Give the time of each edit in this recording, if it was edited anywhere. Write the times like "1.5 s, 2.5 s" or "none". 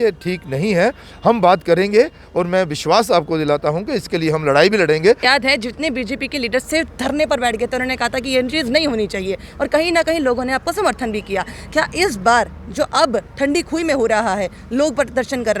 5.2 s